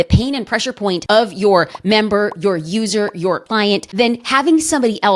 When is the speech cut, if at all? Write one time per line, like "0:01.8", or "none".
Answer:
0:01.0
0:03.4